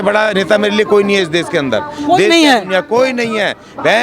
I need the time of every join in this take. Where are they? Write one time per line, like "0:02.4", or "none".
none